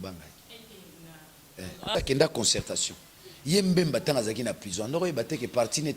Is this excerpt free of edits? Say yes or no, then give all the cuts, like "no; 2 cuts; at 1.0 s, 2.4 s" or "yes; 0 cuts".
no; 1 cut; at 1.9 s